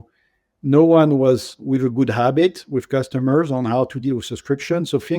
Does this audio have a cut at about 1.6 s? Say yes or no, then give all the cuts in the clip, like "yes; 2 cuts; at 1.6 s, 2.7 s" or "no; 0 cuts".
yes; 1 cut; at 1.6 s